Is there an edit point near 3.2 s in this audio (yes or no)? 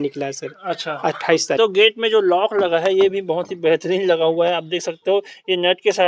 no